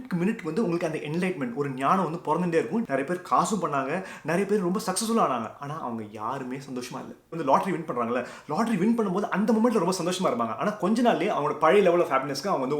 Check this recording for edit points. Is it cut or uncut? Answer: cut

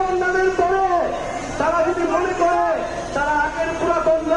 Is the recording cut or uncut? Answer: uncut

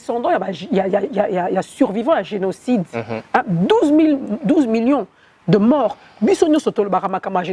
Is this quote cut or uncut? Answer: uncut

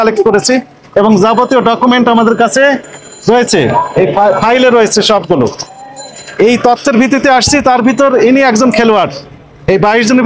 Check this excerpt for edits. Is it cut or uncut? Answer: uncut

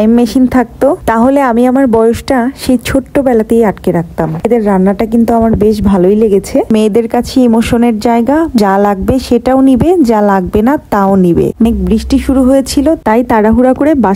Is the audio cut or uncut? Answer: cut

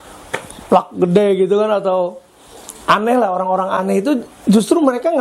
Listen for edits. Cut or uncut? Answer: uncut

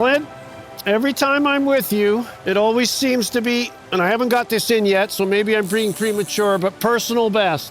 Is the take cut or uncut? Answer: cut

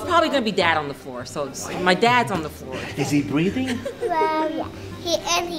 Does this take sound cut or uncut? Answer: uncut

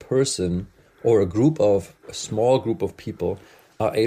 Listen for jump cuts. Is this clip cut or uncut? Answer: uncut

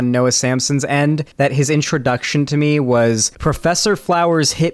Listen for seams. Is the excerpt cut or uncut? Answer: cut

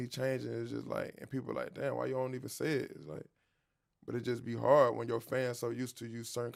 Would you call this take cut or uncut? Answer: uncut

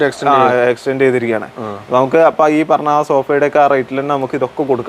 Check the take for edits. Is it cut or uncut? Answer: uncut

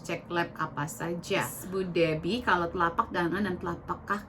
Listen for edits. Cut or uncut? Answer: cut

